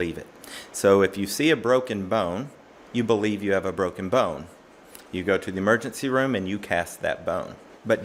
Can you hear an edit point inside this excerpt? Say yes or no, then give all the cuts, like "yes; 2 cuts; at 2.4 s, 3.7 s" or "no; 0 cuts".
no; 0 cuts